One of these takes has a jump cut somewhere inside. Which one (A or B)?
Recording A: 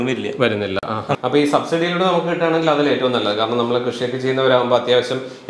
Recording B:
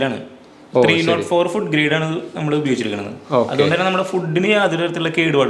A